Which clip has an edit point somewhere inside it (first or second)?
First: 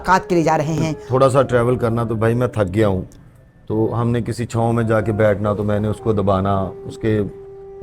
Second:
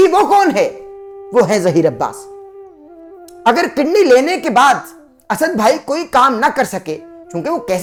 first